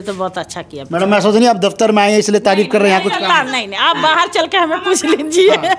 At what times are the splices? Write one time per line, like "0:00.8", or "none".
none